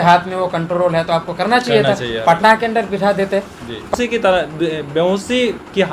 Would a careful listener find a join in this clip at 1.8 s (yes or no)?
no